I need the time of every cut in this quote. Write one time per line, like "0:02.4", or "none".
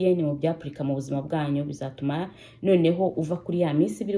none